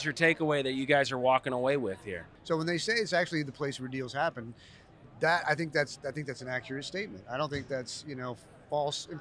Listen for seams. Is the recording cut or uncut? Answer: cut